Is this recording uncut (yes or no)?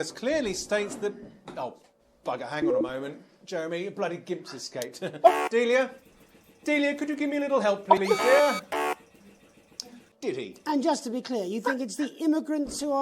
no